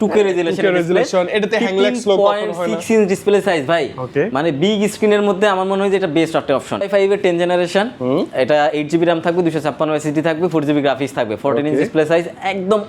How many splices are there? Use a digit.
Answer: 1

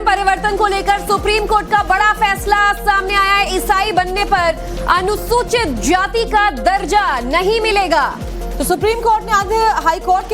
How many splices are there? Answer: 0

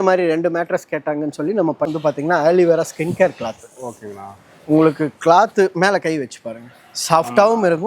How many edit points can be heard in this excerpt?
1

